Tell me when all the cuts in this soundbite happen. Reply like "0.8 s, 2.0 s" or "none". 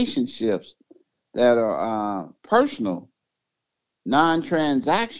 2.3 s